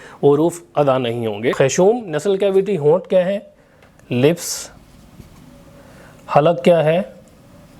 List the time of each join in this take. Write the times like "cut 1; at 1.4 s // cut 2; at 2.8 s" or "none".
cut 1; at 1.5 s

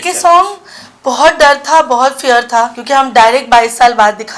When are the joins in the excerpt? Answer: cut 1; at 2.8 s

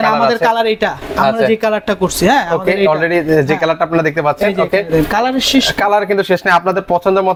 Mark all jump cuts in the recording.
none

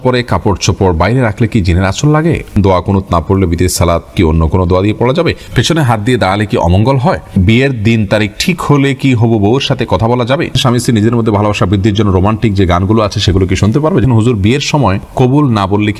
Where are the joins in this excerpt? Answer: cut 1; at 2.5 s // cut 2; at 4.1 s // cut 3; at 5.4 s // cut 4; at 7.4 s // cut 5; at 10.5 s // cut 6; at 14.0 s

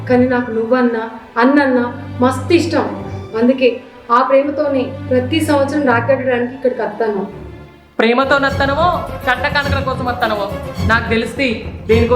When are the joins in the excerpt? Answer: none

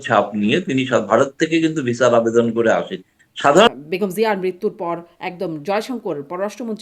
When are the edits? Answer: cut 1; at 3.7 s

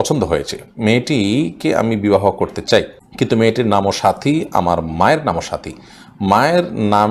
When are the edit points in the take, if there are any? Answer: cut 1; at 3.0 s

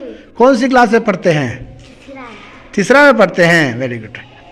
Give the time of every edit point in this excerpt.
none

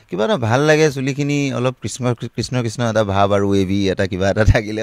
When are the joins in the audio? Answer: none

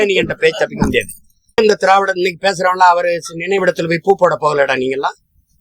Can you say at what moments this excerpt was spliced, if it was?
cut 1; at 1.6 s

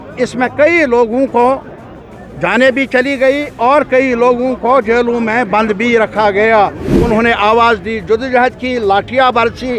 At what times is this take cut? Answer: cut 1; at 6.9 s

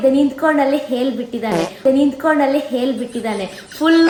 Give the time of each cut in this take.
none

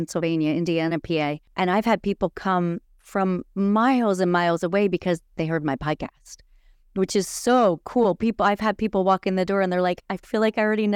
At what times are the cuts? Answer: cut 1; at 1.4 s

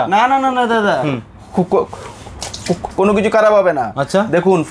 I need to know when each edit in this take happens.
none

